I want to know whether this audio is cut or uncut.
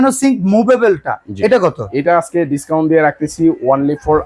uncut